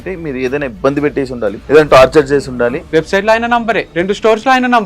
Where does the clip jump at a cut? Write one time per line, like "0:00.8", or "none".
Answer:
0:01.6
0:02.8
0:03.9